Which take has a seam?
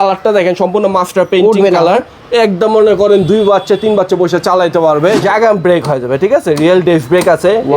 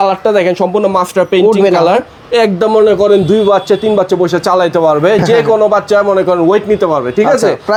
first; 1 cut; at 5.2 s

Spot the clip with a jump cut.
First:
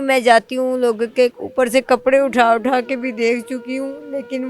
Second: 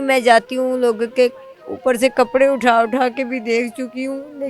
first; 1 cut; at 1.4 s

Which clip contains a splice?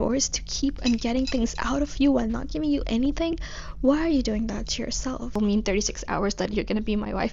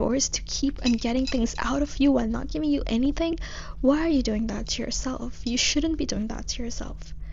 first; 1 cut; at 5.3 s

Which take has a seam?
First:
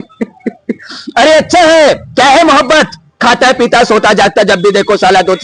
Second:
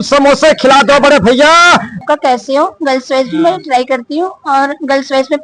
second; 1 cut; at 1.9 s

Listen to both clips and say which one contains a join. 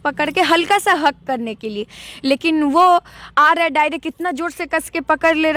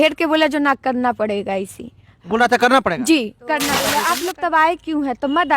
second; 1 cut; at 3.8 s

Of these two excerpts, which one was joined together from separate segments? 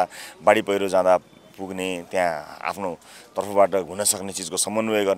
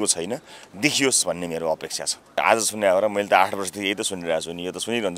second; 1 cut; at 2.4 s

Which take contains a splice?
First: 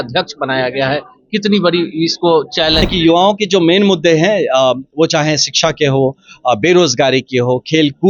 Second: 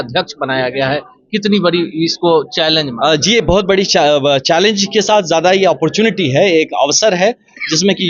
first; 1 cut; at 2.9 s

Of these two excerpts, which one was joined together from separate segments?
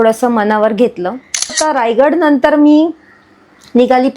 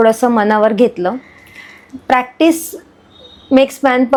first; 1 cut; at 1.6 s

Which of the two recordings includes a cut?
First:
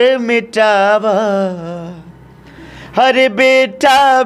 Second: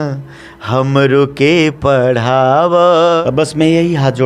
second; 1 cut; at 3.2 s

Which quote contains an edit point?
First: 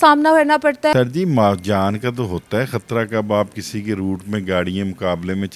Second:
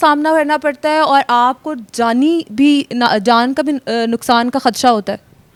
first; 1 cut; at 0.9 s

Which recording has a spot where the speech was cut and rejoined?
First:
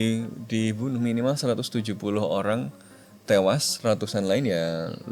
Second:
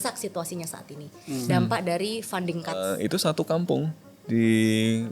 second; 1 cut; at 2.9 s

